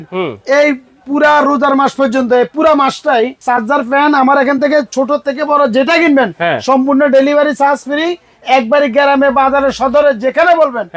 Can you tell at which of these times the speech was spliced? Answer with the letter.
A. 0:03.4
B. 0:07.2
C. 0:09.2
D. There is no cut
A